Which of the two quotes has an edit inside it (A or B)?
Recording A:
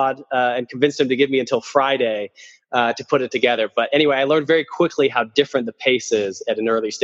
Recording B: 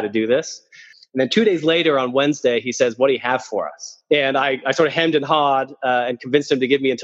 B